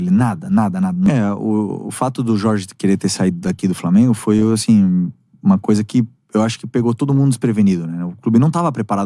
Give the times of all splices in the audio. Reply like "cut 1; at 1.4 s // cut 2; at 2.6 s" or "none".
cut 1; at 1.2 s